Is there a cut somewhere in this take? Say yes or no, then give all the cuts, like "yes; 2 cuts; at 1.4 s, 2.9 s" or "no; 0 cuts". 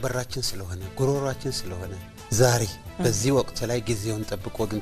yes; 1 cut; at 2.1 s